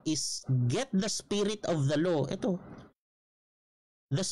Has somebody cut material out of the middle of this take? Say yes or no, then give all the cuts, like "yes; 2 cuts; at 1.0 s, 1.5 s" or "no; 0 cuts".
no; 0 cuts